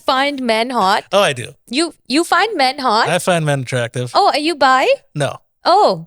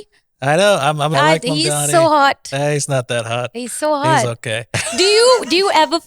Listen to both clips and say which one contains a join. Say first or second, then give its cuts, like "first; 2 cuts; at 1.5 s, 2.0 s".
second; 2 cuts; at 1.1 s, 4.8 s